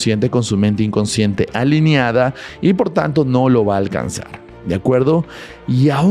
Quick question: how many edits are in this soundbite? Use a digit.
0